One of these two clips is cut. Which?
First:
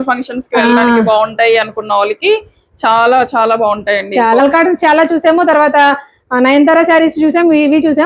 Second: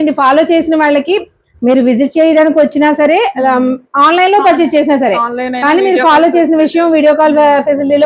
first; 1 cut; at 4.4 s

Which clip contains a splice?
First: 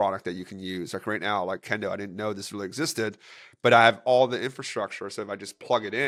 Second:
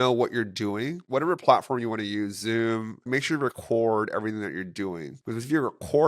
second; 3 cuts; at 1.0 s, 3.1 s, 5.1 s

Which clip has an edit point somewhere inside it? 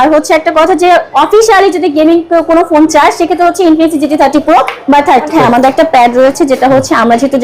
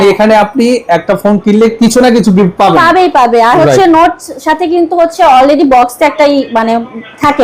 first; 1 cut; at 5.3 s

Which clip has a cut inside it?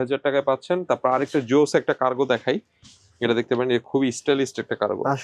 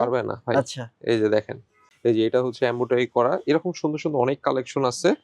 second; 1 cut; at 1.8 s

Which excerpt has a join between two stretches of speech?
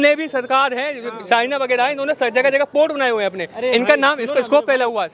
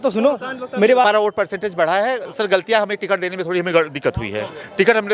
second; 1 cut; at 1.0 s

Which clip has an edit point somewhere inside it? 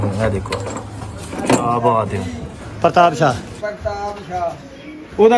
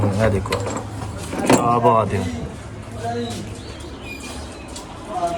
first; 1 cut; at 2.7 s

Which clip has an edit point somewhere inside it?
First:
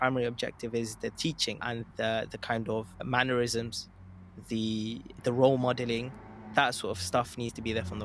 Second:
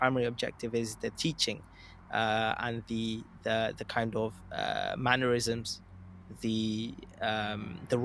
first; 3 cuts; at 1.8 s, 3.0 s, 5.1 s

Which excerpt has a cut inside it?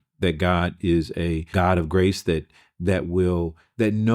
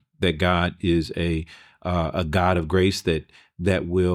first; 1 cut; at 1.5 s

